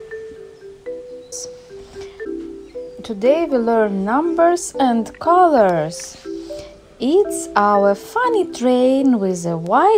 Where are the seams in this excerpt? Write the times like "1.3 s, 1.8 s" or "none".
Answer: 1.1 s